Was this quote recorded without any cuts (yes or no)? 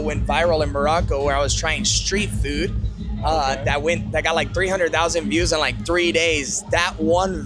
yes